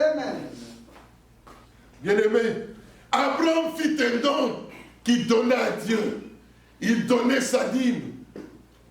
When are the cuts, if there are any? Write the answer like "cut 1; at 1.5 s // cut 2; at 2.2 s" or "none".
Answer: cut 1; at 1.6 s